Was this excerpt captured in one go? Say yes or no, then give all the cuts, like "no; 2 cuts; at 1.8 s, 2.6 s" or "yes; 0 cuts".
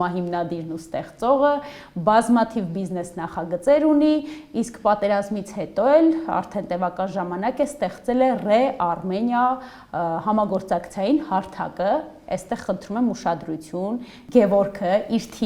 yes; 0 cuts